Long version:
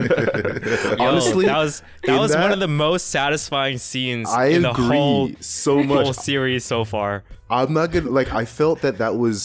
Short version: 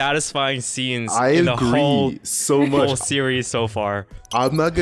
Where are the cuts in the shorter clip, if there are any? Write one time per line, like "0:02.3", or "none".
none